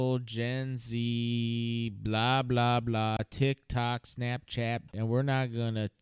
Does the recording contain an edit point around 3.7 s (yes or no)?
no